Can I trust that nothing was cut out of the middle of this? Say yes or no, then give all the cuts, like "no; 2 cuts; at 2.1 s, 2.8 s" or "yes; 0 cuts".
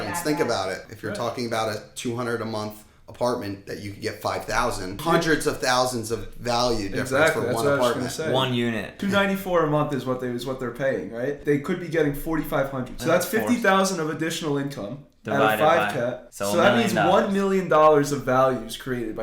no; 6 cuts; at 0.9 s, 5.0 s, 9.0 s, 11.4 s, 13.0 s, 16.3 s